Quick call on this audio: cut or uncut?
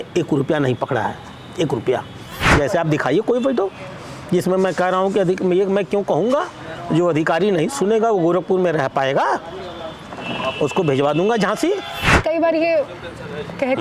cut